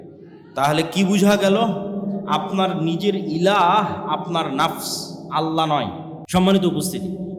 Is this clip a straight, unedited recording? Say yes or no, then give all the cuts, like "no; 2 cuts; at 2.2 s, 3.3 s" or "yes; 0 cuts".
no; 1 cut; at 6.1 s